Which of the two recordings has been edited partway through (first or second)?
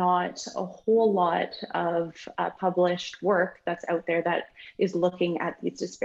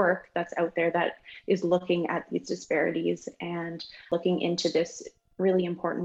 second